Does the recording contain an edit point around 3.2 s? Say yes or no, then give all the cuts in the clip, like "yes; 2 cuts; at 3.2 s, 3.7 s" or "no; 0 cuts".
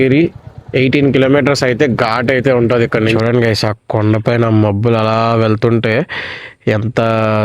yes; 1 cut; at 3.2 s